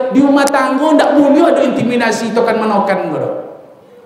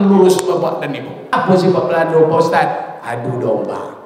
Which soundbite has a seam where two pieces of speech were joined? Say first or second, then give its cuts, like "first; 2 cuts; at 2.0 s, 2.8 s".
second; 1 cut; at 1.2 s